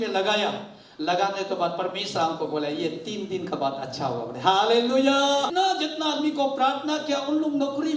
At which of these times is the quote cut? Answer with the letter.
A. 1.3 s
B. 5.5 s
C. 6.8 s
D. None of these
B